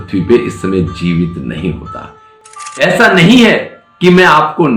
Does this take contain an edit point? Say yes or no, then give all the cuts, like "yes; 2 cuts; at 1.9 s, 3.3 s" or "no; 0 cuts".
yes; 1 cut; at 2.3 s